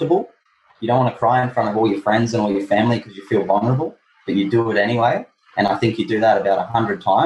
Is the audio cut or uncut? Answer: uncut